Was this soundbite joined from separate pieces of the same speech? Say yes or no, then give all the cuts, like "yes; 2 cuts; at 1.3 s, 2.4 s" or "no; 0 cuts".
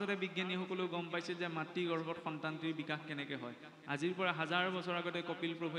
no; 0 cuts